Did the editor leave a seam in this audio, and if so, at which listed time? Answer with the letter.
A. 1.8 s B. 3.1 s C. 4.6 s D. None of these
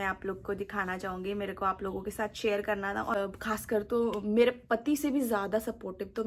B